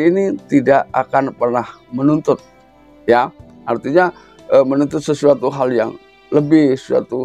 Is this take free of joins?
yes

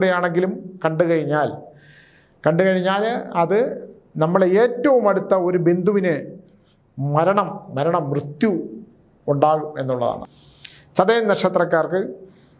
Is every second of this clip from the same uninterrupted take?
no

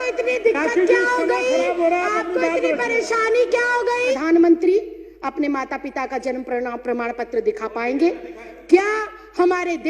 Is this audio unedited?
no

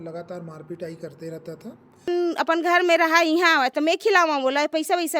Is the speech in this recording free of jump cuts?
no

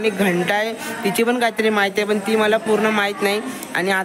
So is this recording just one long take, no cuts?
yes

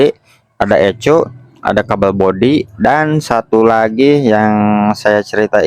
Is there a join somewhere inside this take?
no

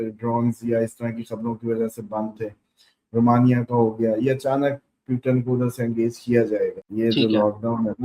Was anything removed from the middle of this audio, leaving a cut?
yes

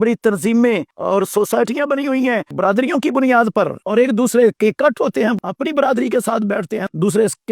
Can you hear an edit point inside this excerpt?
yes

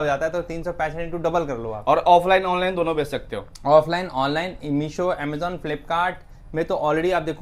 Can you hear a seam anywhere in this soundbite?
no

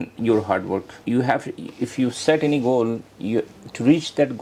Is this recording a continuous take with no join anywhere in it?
no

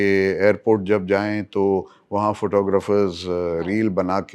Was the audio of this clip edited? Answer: no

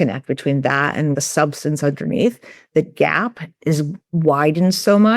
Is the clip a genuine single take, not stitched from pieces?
no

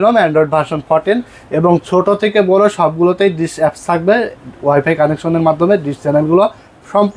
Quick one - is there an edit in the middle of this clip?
no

